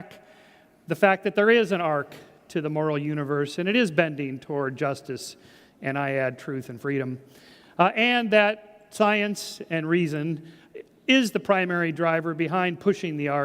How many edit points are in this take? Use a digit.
1